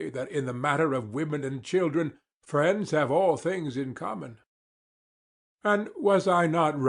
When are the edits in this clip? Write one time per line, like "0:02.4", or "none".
none

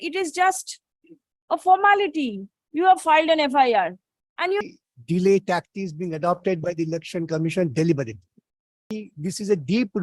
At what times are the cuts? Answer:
0:04.6
0:09.0

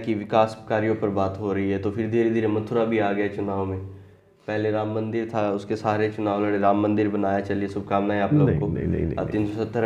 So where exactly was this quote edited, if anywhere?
none

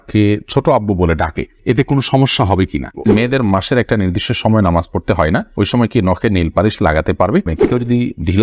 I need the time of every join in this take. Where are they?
0:03.1
0:07.7

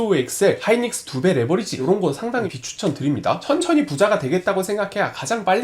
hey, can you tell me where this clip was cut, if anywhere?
0:01.8
0:03.4

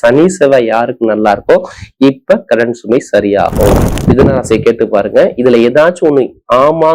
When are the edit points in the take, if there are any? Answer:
0:03.9

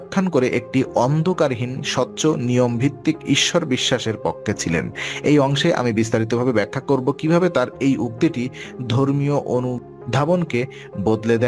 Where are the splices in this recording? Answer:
0:09.9

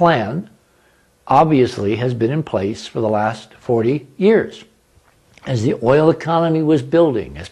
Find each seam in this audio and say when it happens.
none

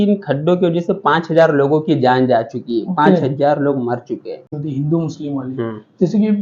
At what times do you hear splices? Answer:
0:04.6

